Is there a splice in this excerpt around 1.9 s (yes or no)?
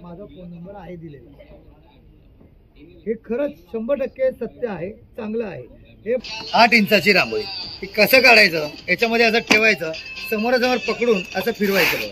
no